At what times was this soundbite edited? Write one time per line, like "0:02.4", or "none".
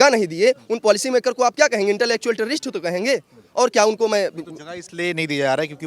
none